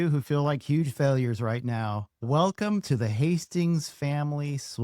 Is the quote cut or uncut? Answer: cut